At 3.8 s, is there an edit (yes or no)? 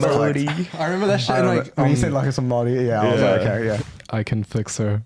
yes